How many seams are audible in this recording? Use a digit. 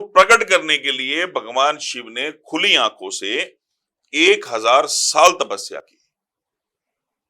0